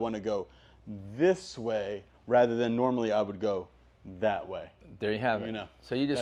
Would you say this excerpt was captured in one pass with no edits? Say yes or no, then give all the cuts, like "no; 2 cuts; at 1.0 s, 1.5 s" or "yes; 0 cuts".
yes; 0 cuts